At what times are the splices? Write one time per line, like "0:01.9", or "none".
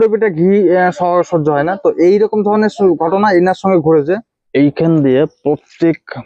0:04.4

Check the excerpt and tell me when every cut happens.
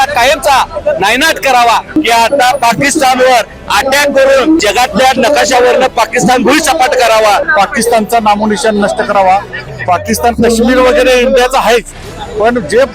0:02.0
0:07.4

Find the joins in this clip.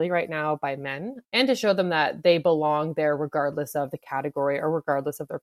0:01.1

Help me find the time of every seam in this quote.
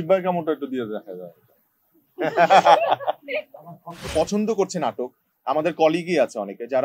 0:03.9

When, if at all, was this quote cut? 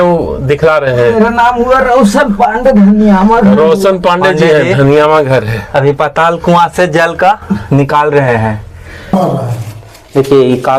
0:09.1

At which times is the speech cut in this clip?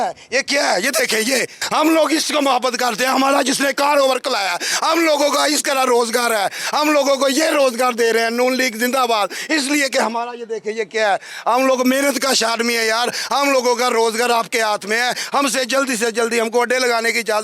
none

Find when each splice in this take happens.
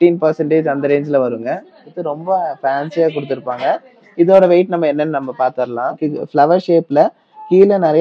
0:02.0
0:06.0

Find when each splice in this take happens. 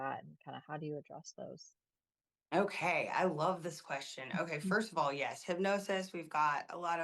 none

